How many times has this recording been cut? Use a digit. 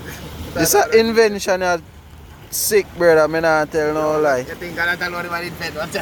0